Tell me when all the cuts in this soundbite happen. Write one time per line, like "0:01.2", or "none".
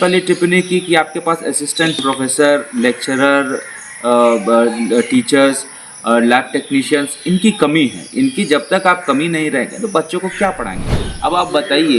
0:10.8